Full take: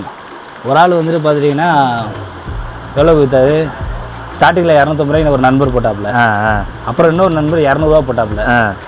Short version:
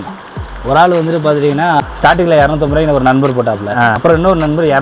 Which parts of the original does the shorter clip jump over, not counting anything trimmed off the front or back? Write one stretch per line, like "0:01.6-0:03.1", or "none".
0:01.8-0:04.1
0:06.3-0:06.9